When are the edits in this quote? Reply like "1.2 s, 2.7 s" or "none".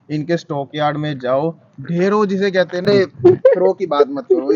2.9 s